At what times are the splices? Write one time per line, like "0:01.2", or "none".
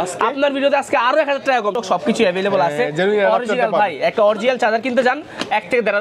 0:01.7